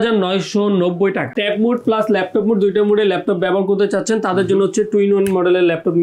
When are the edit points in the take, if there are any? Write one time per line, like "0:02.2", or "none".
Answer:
0:01.3